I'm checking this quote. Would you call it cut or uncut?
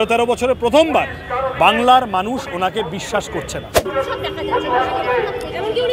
cut